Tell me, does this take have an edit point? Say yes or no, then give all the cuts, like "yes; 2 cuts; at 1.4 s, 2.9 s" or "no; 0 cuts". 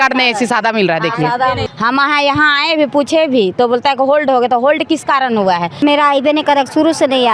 yes; 2 cuts; at 1.6 s, 5.8 s